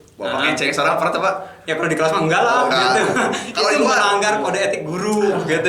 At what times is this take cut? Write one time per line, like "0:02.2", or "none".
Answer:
none